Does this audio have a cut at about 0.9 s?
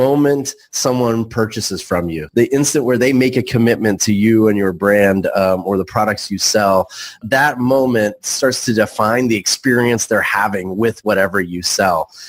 no; 2 cuts; at 2.2 s, 7.2 s

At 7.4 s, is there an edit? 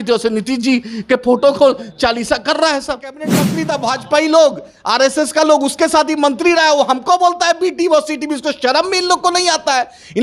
no; 1 cut; at 3.6 s

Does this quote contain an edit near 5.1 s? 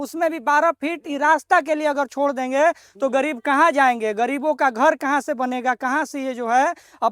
no; 0 cuts

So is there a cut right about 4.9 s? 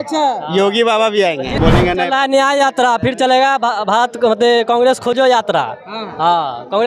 no; 1 cut; at 1.5 s

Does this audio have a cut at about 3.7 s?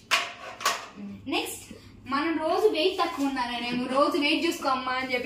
no; 1 cut; at 1.2 s

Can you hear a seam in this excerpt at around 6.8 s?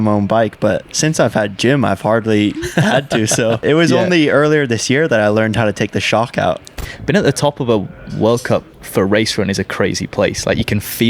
yes; 2 cuts; at 3.6 s, 6.8 s

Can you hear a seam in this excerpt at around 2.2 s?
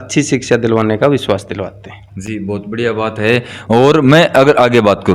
no; 0 cuts

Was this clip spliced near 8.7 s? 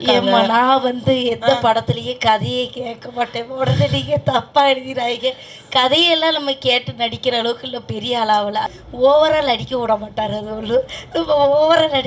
yes; 1 cut; at 8.7 s

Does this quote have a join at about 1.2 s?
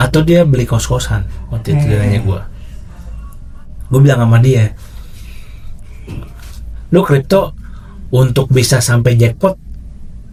no; 0 cuts

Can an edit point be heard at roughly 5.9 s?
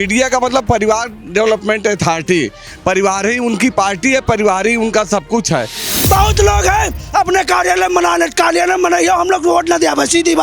yes; 1 cut; at 5.9 s

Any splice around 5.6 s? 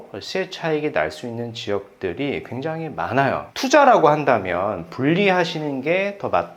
no; 1 cut; at 3.5 s

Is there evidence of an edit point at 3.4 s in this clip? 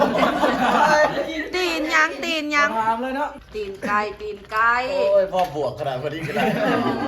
yes; 1 cut; at 3.4 s

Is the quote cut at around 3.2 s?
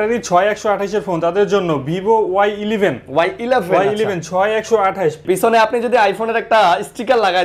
no; 1 cut; at 5.2 s

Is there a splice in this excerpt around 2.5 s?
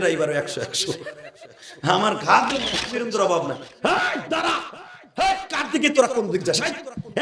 yes; 1 cut; at 2.5 s

